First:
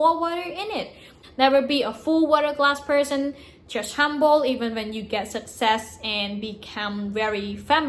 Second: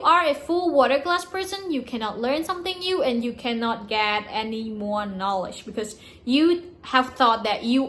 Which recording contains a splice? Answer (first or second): first